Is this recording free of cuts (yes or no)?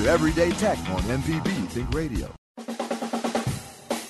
yes